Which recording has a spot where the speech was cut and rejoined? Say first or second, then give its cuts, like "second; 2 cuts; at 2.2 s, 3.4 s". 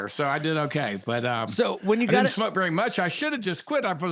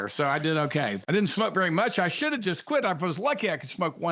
second; 1 cut; at 1.2 s